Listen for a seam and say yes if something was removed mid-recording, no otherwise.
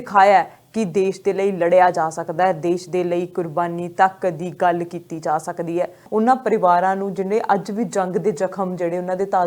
yes